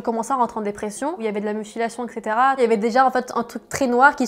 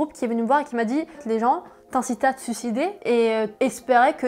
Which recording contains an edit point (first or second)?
first